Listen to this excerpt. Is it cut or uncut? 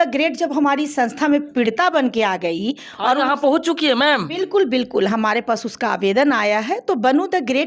uncut